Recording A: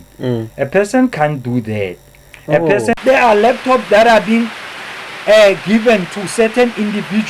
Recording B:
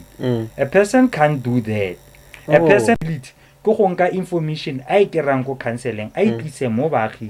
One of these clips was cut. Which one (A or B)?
A